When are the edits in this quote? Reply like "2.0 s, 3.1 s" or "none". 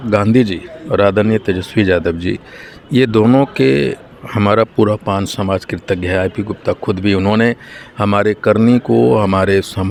none